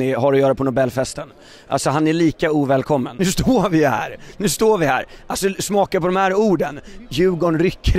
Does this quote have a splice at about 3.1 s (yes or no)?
yes